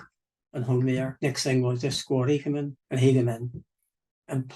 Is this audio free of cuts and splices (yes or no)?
no